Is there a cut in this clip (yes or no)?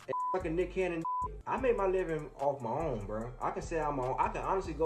yes